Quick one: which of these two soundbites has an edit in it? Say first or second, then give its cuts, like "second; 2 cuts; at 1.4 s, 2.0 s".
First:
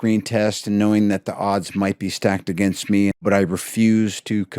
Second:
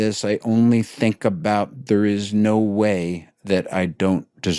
first; 1 cut; at 3.2 s